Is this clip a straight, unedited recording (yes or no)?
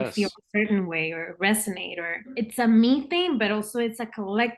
no